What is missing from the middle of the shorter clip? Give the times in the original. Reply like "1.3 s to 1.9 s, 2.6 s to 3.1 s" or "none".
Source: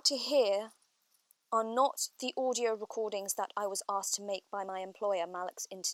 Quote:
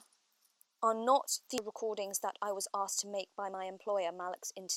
2.3 s to 2.8 s